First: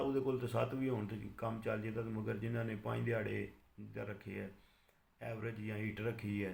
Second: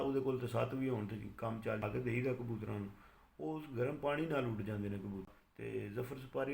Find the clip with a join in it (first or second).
second